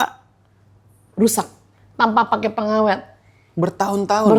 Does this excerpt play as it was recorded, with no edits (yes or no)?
yes